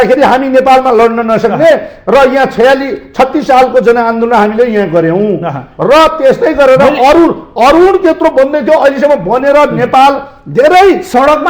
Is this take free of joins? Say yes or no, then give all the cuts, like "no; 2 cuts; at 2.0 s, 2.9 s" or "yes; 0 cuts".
yes; 0 cuts